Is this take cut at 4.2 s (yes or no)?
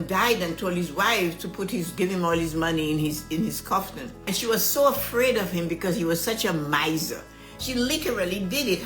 yes